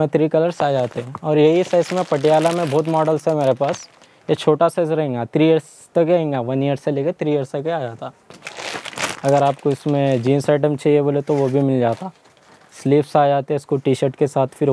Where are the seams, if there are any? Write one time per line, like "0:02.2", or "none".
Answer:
none